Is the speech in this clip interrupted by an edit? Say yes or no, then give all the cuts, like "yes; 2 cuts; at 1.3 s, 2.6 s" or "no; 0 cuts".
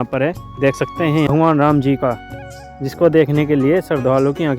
yes; 1 cut; at 0.9 s